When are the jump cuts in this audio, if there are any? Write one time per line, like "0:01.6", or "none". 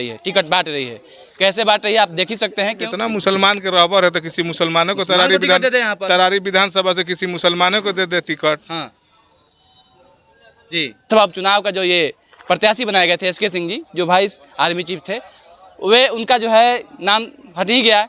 0:02.8
0:11.1